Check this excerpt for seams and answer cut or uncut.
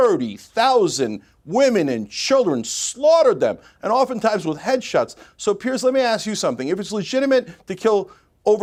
uncut